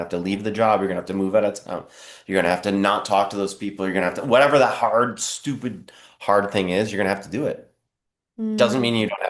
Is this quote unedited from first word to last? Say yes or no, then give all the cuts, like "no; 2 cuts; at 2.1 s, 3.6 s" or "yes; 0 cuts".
yes; 0 cuts